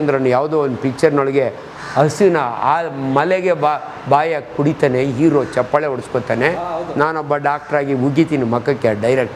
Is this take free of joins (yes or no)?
yes